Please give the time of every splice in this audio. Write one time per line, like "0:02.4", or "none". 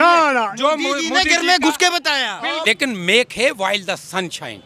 0:02.6